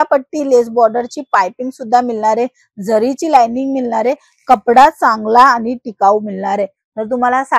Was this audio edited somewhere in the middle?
no; 0 cuts

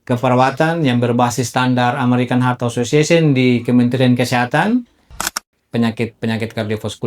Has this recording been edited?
yes; 1 cut; at 5.2 s

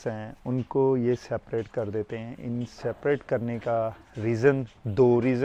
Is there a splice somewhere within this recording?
no; 0 cuts

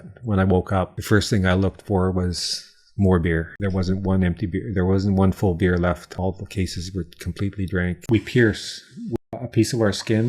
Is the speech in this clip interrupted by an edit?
yes; 5 cuts; at 1.0 s, 3.5 s, 6.1 s, 8.0 s, 9.3 s

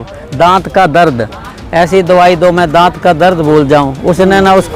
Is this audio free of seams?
yes; 0 cuts

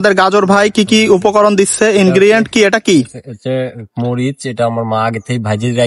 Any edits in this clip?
no; 0 cuts

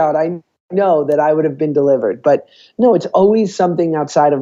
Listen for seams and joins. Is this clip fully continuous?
yes; 0 cuts

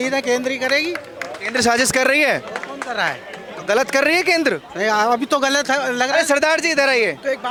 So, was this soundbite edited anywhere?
no; 0 cuts

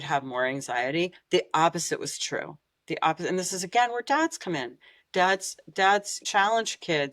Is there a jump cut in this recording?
yes; 1 cut; at 6.2 s

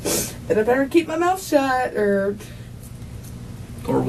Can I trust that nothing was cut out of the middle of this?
yes; 0 cuts

